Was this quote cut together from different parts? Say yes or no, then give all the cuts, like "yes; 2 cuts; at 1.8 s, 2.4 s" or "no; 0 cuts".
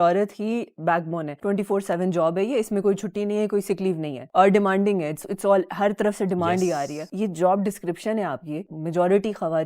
yes; 2 cuts; at 1.3 s, 4.2 s